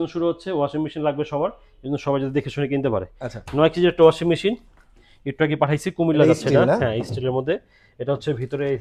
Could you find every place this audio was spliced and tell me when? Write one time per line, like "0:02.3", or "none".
none